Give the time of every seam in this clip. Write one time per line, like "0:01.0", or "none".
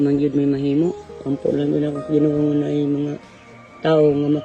0:01.1